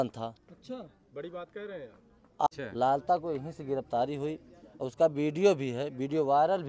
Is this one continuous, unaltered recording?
no; 1 cut; at 2.5 s

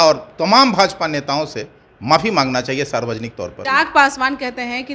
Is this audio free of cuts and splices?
no; 1 cut; at 3.7 s

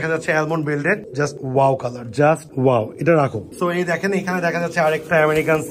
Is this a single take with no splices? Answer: yes; 0 cuts

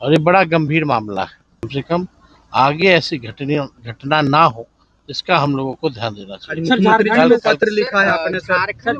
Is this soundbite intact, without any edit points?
no; 1 cut; at 1.7 s

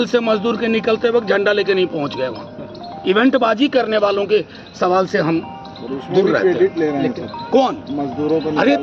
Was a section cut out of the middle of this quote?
no; 0 cuts

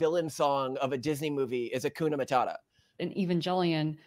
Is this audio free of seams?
no; 1 cut; at 3.0 s

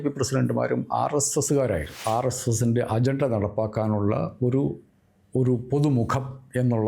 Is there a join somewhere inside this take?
yes; 1 cut; at 1.9 s

